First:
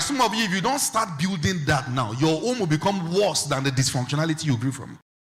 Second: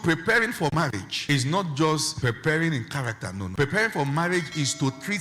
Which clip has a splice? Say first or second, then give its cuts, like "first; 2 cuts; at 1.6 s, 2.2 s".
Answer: second; 3 cuts; at 0.7 s, 2.1 s, 3.4 s